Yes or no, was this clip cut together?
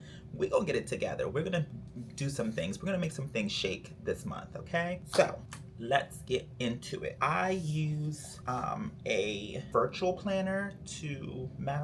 no